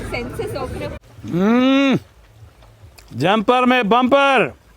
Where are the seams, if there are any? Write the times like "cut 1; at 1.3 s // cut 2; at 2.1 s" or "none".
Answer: cut 1; at 1.1 s